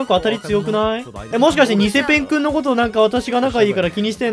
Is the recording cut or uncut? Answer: cut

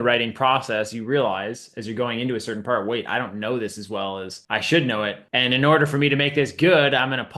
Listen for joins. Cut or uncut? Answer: cut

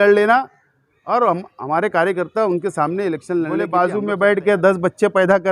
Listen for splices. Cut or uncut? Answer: cut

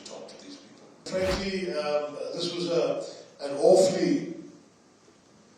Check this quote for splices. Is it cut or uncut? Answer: cut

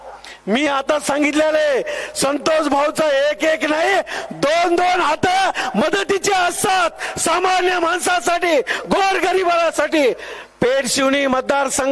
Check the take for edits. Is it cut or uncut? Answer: uncut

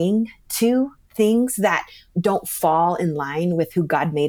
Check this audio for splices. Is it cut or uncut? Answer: cut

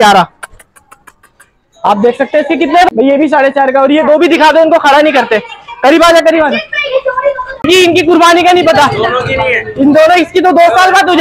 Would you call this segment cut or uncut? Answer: cut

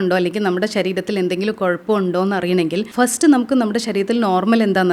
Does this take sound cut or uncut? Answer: cut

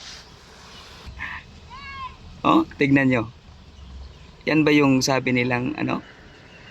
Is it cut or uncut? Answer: cut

